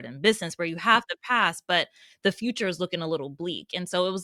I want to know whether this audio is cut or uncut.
uncut